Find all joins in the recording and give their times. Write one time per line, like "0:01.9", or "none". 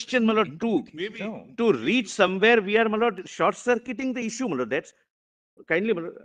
none